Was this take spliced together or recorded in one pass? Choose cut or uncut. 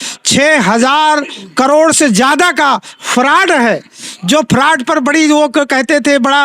uncut